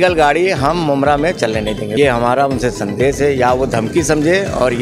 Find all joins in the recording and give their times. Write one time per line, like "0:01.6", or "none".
0:02.0